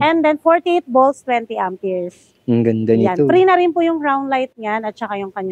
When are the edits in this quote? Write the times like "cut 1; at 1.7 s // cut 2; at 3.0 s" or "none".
none